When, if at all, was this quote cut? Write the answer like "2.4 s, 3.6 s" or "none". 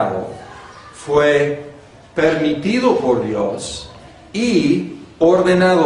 2.9 s